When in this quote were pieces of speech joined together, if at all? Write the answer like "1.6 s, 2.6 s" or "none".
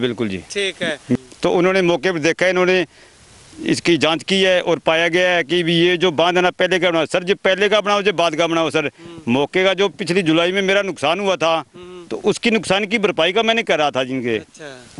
1.2 s